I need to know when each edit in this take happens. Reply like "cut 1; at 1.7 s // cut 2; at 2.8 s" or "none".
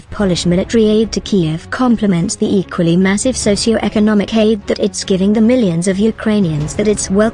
cut 1; at 1.9 s